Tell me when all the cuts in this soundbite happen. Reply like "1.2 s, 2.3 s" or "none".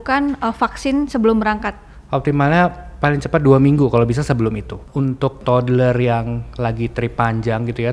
5.2 s